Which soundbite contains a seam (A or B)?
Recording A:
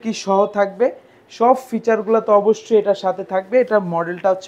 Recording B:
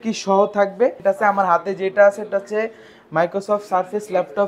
B